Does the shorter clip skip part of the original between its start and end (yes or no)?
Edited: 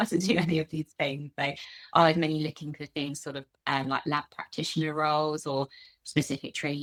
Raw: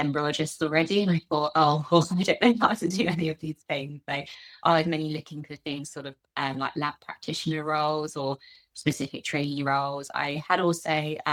no